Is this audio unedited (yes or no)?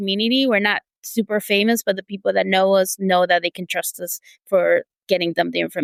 yes